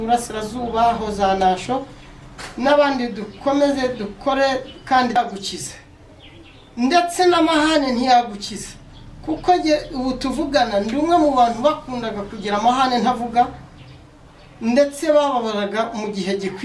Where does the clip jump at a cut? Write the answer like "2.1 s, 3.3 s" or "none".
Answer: 5.2 s

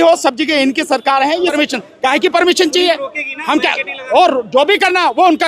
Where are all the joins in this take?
1.5 s

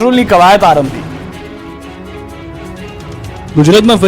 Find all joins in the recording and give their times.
none

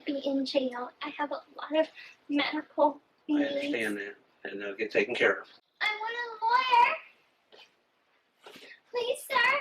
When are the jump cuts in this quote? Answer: none

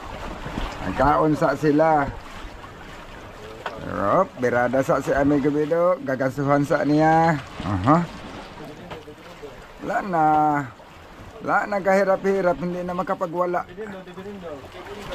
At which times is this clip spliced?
none

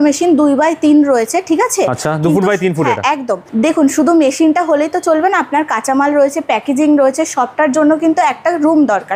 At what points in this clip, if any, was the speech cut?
none

